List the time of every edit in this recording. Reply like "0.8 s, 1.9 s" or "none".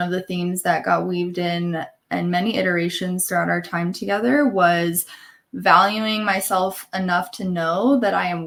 none